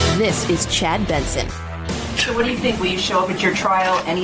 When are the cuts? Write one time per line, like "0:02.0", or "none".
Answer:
0:02.2